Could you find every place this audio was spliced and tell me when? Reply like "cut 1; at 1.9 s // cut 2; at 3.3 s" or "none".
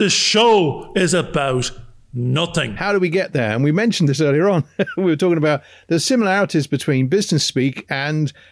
cut 1; at 2.7 s